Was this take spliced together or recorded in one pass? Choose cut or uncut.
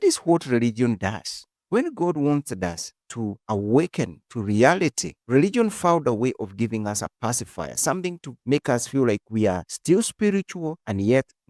uncut